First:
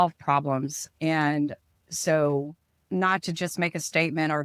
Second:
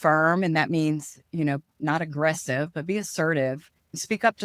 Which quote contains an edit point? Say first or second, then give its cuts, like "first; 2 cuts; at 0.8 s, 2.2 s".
second; 1 cut; at 1.7 s